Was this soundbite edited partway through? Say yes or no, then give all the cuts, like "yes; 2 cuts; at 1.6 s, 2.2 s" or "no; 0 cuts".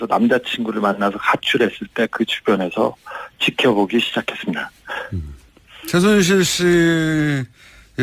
yes; 1 cut; at 3.0 s